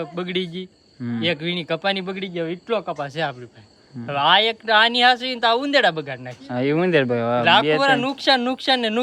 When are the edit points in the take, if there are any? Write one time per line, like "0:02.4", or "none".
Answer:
none